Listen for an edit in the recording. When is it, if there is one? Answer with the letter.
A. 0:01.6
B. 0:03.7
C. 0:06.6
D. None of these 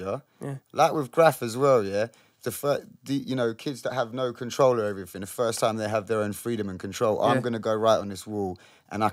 D